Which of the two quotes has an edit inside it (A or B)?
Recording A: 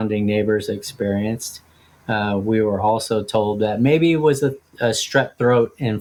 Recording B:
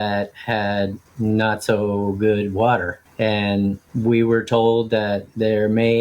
B